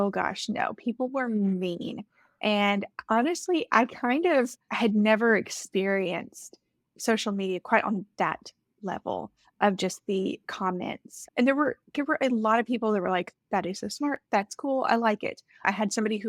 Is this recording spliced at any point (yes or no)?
no